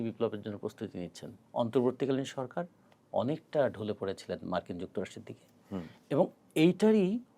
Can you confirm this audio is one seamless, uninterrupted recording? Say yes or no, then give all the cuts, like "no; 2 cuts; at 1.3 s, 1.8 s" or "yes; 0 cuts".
no; 1 cut; at 1.3 s